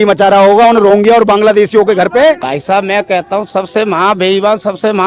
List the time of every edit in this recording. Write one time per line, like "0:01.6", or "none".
0:02.5